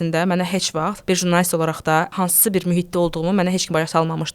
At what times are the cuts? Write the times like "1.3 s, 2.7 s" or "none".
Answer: 1.0 s, 2.1 s